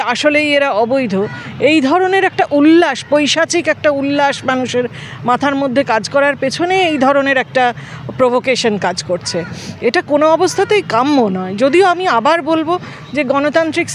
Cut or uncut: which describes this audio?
uncut